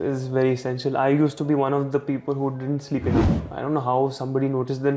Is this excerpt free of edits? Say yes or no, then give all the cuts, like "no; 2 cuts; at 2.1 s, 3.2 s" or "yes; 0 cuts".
no; 1 cut; at 3.4 s